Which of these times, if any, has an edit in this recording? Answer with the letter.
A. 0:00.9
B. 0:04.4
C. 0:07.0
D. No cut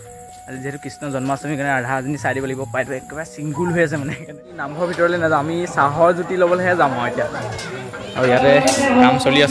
B